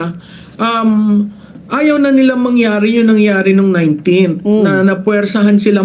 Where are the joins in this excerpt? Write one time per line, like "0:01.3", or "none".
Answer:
0:04.9